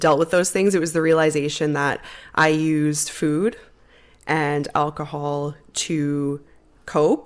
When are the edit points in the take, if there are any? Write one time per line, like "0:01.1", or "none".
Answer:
none

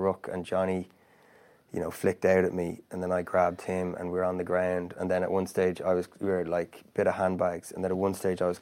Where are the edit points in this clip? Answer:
none

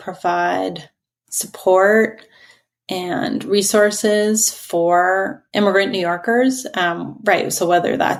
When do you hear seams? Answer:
none

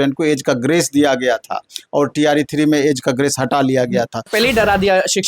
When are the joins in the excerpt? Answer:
0:04.3

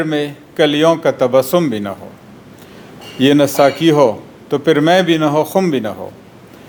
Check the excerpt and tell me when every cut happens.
none

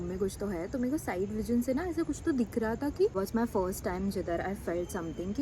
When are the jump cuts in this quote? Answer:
0:03.2

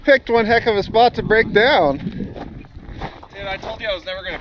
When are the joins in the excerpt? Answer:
none

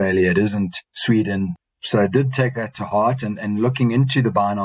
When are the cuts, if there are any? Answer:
0:01.5

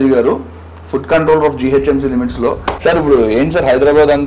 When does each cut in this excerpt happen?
0:02.7

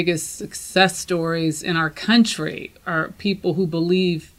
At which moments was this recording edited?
none

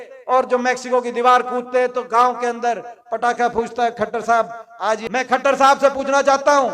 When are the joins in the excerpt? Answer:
0:05.0

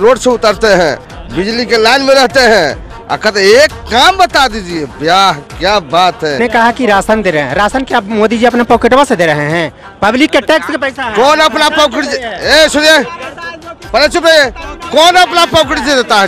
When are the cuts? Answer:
0:06.4

